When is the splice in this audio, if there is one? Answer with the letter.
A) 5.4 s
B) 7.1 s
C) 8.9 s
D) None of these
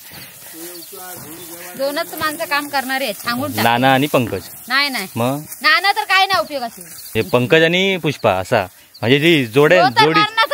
B